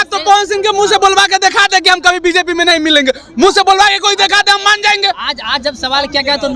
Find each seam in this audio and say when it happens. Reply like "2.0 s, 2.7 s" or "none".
none